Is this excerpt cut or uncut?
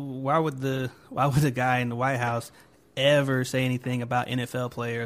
uncut